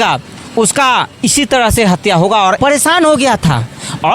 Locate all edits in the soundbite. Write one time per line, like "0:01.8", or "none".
0:02.6